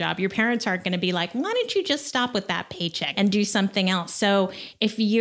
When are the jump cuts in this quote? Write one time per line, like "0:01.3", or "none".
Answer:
0:03.0